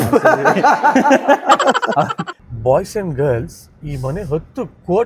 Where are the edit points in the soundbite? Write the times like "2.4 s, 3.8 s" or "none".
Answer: 2.4 s